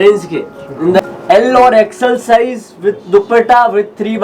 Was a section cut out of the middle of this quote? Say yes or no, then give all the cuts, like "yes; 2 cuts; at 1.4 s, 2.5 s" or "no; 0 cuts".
yes; 1 cut; at 1.0 s